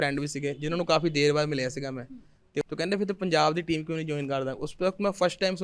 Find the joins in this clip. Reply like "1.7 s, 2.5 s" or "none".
2.6 s